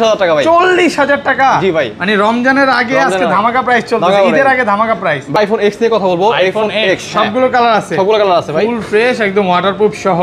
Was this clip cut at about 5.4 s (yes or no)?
yes